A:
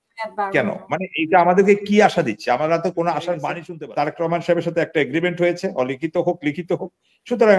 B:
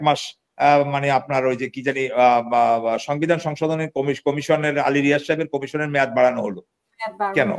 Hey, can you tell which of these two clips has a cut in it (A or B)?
A